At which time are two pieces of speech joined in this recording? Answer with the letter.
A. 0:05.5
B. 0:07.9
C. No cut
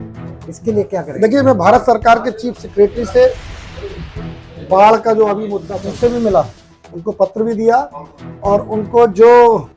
A